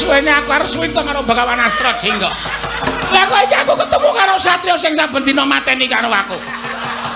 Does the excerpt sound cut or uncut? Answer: uncut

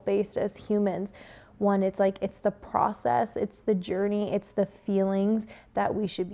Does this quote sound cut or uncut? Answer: uncut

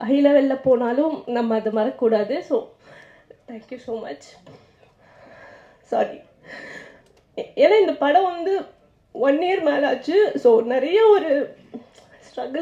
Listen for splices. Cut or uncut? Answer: uncut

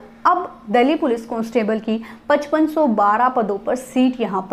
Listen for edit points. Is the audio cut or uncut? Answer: uncut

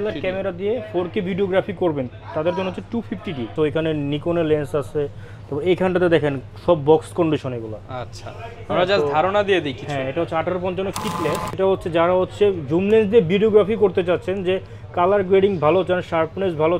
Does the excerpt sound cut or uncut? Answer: cut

